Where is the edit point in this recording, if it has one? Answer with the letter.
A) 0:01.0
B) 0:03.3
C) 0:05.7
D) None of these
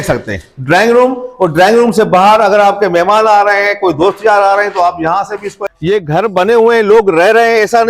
C